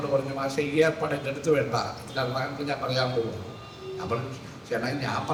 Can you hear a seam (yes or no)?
no